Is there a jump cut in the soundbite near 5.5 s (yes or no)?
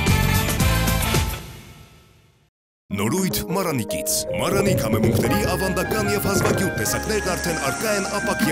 no